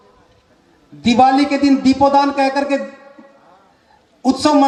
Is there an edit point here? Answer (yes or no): no